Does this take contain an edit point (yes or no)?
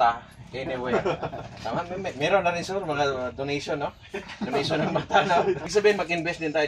yes